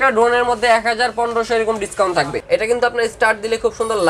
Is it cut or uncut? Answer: cut